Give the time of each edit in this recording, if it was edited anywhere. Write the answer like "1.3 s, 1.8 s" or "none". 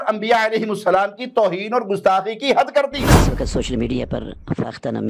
3.2 s